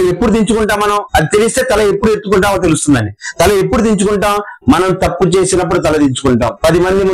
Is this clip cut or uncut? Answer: uncut